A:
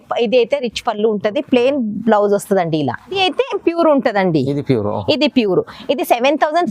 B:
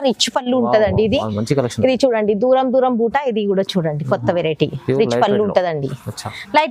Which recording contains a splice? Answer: A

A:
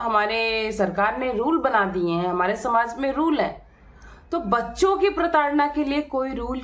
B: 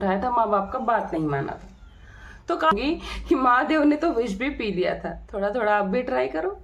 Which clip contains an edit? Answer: B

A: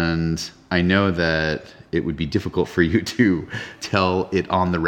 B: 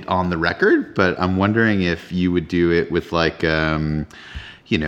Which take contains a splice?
A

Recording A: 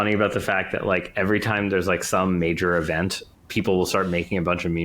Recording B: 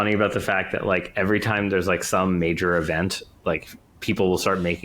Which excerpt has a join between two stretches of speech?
A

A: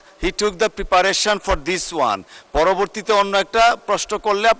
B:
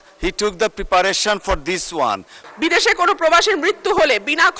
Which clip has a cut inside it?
B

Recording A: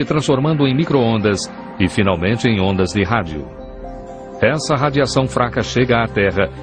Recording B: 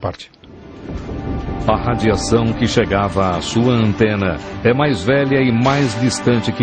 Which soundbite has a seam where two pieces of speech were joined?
B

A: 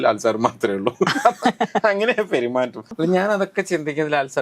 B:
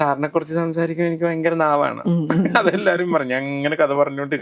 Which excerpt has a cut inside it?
A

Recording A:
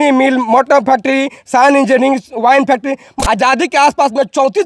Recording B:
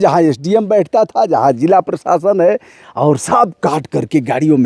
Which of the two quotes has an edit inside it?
A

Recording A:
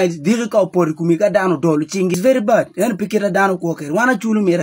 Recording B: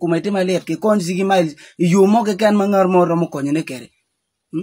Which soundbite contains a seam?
A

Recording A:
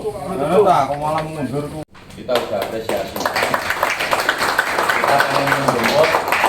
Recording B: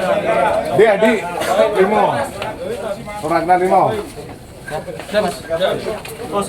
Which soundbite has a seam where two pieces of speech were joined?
A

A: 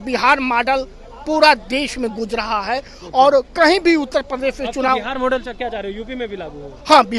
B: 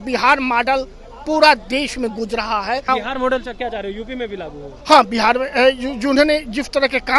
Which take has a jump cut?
B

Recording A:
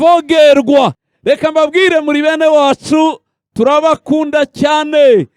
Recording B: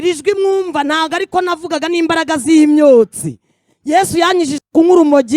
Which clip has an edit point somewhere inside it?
A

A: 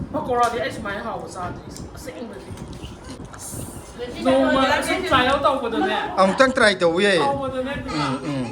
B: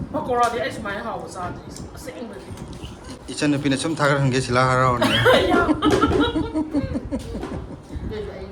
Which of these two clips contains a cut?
A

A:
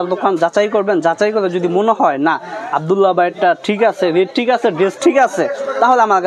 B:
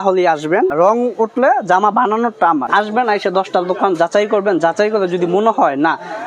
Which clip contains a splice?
B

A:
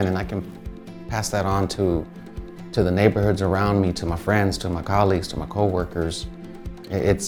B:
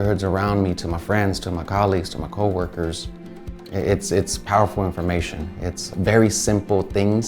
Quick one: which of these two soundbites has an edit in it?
B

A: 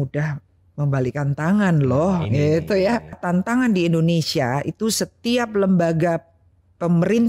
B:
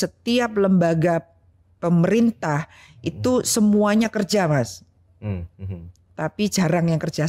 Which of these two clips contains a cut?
A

